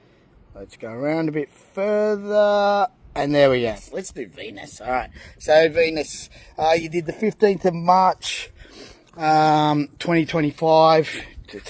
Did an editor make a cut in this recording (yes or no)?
yes